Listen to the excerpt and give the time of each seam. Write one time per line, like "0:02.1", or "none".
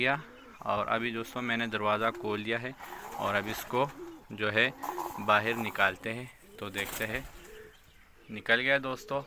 none